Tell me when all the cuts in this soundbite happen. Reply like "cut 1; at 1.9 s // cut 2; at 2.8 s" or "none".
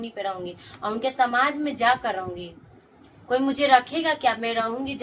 none